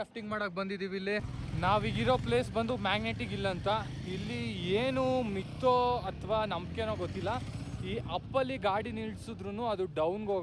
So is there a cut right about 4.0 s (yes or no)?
no